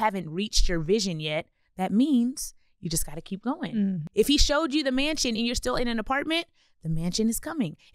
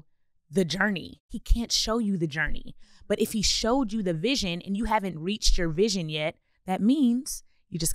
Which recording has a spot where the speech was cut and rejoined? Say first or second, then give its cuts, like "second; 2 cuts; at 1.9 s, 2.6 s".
second; 1 cut; at 1.2 s